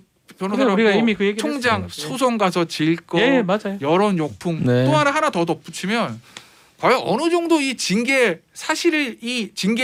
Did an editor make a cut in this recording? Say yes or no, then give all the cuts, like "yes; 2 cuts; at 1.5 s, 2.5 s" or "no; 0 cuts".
no; 0 cuts